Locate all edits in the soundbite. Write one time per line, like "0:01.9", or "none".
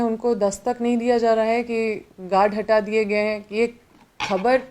none